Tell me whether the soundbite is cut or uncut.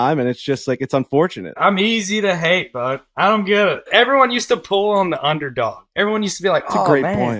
cut